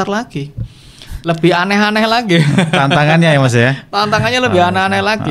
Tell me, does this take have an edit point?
no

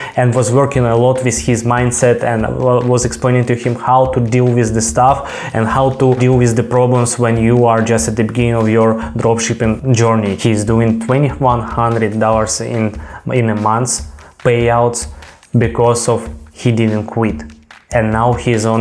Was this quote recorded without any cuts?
no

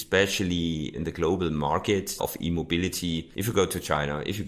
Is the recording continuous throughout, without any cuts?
no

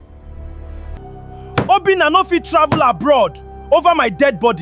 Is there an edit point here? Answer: yes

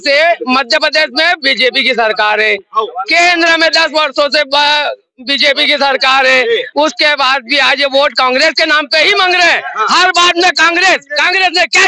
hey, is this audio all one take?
yes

